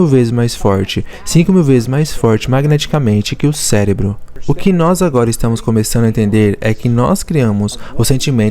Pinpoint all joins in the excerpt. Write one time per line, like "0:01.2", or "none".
0:04.3